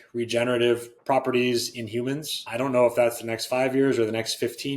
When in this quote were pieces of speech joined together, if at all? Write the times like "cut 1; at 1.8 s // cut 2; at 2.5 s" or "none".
cut 1; at 0.9 s // cut 2; at 2.4 s